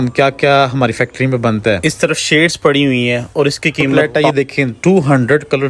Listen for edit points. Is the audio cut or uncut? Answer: cut